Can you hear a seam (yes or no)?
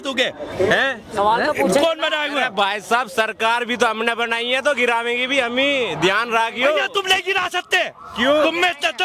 no